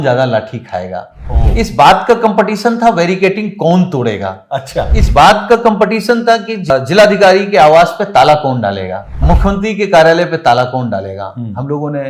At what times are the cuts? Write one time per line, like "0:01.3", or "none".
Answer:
0:06.7
0:09.2